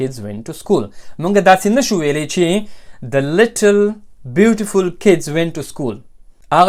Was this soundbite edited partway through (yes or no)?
no